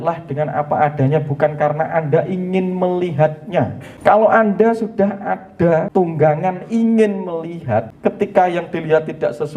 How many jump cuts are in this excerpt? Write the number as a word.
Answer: three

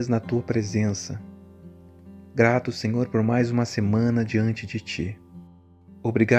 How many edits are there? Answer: two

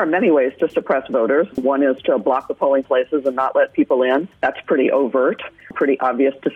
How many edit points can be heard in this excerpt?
one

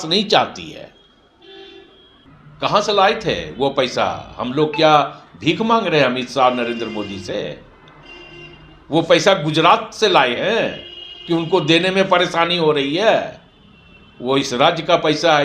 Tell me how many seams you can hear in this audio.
one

